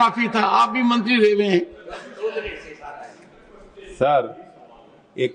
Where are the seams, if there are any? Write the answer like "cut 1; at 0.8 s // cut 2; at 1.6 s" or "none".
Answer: none